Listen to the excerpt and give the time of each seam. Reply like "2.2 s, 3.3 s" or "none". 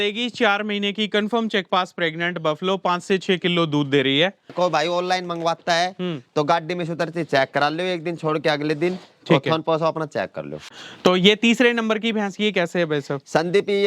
4.5 s, 10.6 s